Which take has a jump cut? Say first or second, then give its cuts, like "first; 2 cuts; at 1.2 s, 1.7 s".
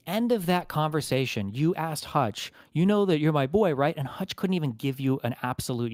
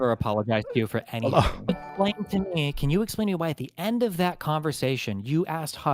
second; 1 cut; at 1.7 s